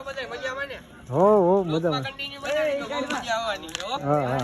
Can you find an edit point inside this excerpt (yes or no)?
no